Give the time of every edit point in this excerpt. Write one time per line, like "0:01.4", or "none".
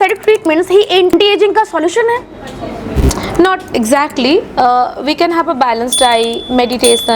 0:01.1